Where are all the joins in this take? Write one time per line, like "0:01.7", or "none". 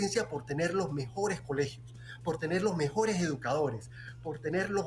none